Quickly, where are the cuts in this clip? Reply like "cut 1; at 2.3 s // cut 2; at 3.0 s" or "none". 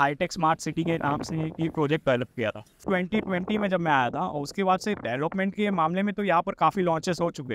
cut 1; at 2.7 s